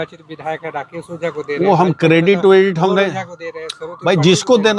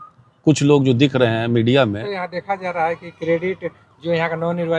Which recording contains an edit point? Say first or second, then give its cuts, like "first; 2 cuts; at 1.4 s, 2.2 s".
second; 1 cut; at 2.1 s